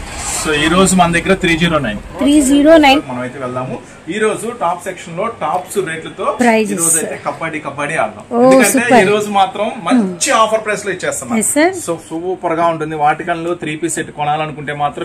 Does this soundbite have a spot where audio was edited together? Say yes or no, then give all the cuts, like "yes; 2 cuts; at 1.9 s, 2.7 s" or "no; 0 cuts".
yes; 2 cuts; at 3.0 s, 12.1 s